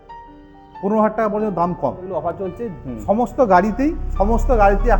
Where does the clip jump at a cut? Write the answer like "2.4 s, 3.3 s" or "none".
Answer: 2.1 s